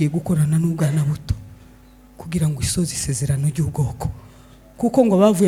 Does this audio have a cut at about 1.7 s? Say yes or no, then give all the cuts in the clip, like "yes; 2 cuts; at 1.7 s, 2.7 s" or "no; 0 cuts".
no; 0 cuts